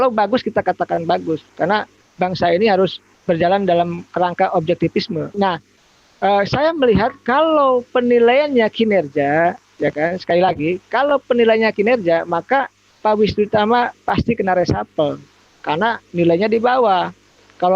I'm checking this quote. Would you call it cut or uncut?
cut